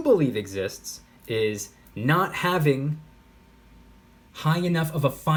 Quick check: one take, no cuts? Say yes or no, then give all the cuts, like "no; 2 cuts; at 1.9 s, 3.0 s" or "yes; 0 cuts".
yes; 0 cuts